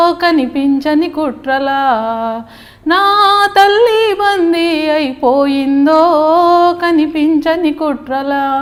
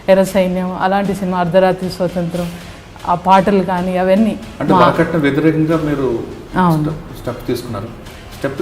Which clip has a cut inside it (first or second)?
second